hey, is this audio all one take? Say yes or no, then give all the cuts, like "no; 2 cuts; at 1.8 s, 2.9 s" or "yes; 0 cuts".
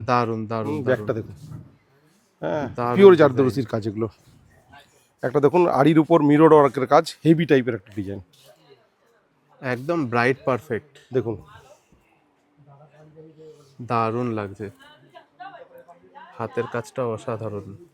yes; 0 cuts